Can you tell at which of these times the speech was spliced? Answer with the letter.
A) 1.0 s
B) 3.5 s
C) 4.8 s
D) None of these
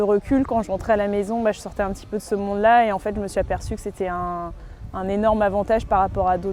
D